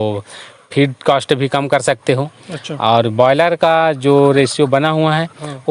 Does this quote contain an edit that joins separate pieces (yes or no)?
no